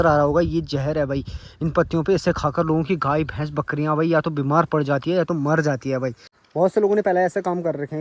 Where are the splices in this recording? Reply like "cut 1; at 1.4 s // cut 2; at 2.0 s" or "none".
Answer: cut 1; at 6.3 s